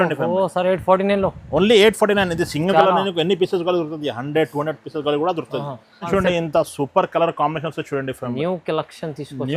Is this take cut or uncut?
cut